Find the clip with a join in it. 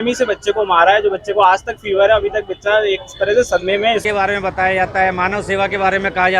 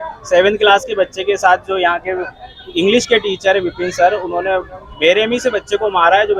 first; 1 cut; at 4.0 s

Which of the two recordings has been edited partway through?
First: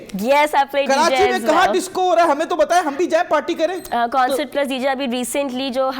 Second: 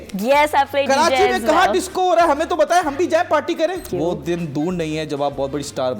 second; 1 cut; at 3.8 s

